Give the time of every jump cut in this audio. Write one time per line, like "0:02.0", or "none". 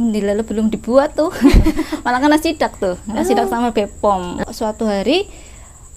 0:04.4